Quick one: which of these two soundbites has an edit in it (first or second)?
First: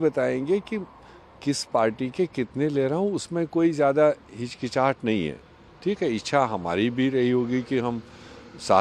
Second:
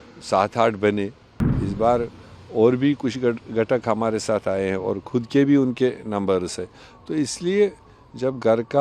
second